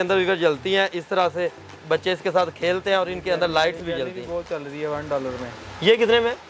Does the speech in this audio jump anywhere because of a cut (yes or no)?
no